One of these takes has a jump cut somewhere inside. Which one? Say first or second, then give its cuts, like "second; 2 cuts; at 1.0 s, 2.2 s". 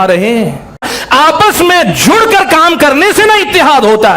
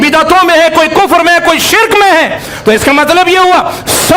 first; 1 cut; at 0.9 s